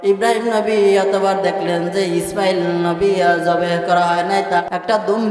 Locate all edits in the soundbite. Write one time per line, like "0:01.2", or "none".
none